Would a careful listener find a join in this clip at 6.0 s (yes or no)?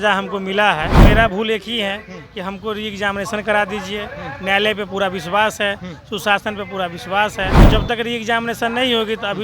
no